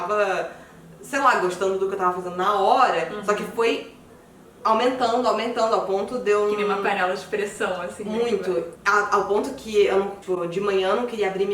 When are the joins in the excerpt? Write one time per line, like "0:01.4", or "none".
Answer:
0:08.8
0:10.2